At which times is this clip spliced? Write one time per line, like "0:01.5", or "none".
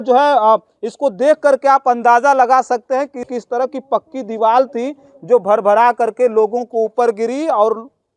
0:03.2